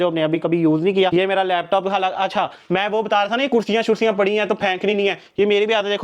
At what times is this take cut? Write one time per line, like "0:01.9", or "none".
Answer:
0:01.1